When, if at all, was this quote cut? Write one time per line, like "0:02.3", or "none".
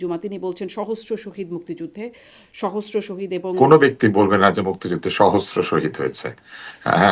0:03.6